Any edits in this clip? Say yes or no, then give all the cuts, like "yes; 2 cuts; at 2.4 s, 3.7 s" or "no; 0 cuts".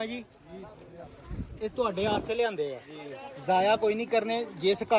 no; 0 cuts